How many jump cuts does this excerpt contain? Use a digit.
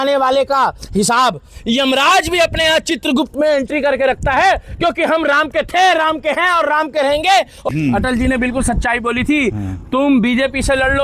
1